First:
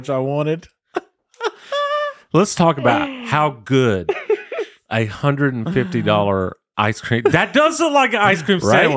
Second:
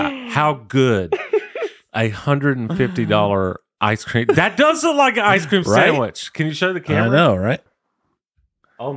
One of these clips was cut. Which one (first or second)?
second